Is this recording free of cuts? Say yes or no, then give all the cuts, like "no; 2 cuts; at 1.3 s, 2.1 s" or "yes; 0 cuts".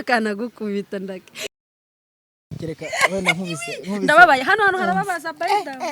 no; 1 cut; at 2.2 s